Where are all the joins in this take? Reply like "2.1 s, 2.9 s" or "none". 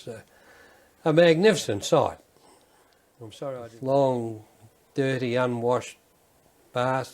3.6 s